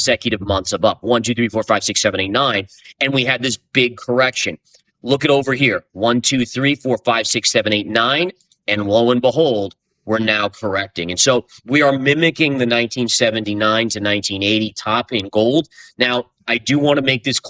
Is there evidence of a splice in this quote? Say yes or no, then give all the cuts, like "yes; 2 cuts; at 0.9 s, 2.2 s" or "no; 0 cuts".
no; 0 cuts